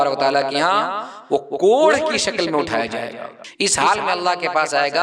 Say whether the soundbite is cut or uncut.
cut